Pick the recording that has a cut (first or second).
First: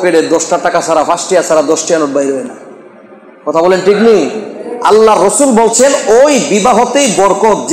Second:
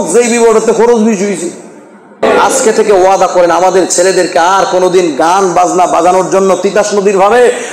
second